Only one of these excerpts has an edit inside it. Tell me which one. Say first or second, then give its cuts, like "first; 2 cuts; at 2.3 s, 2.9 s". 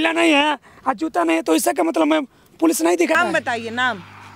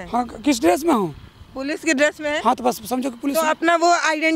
first; 1 cut; at 3.2 s